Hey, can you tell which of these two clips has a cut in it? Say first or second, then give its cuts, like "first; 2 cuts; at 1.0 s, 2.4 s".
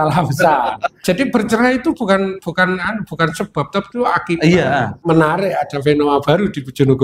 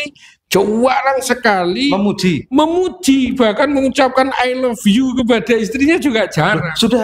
first; 2 cuts; at 1.0 s, 4.9 s